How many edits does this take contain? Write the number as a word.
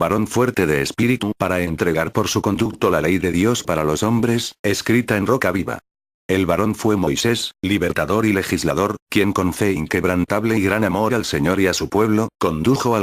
one